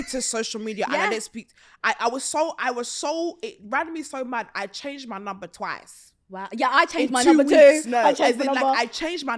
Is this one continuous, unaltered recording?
yes; 0 cuts

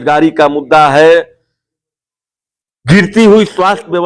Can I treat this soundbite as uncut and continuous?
yes; 0 cuts

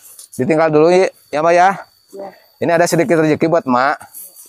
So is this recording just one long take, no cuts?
yes; 0 cuts

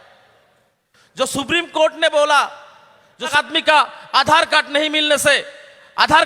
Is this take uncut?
no; 1 cut; at 3.3 s

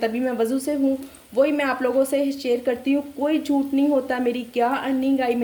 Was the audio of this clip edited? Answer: no; 0 cuts

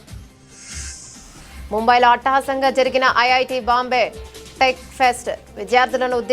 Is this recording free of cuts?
no; 1 cut; at 1.2 s

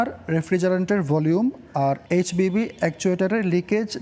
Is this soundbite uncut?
yes; 0 cuts

